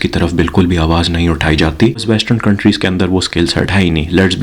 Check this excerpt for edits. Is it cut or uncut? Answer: cut